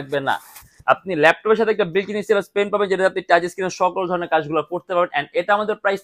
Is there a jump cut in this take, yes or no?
no